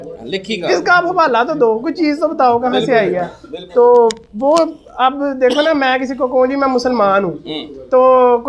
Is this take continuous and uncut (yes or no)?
yes